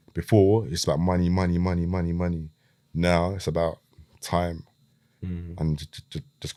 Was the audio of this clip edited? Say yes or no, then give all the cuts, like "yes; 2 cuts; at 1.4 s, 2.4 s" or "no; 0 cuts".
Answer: no; 0 cuts